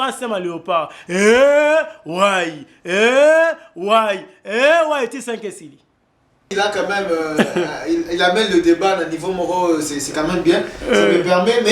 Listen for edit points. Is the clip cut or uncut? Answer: cut